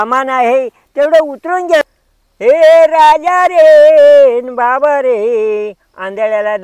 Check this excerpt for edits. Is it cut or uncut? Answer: cut